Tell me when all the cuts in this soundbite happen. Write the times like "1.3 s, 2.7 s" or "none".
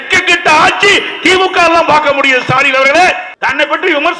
3.3 s